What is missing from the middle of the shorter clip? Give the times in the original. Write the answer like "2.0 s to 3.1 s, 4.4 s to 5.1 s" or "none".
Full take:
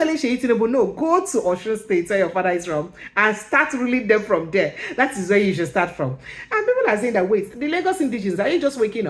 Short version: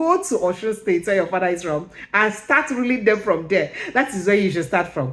none